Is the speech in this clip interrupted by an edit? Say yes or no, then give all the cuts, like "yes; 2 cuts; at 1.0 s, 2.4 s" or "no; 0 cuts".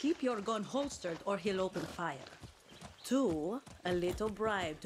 no; 0 cuts